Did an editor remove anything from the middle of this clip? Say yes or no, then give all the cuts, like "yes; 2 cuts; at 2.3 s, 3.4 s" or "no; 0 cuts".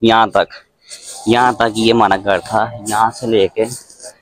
no; 0 cuts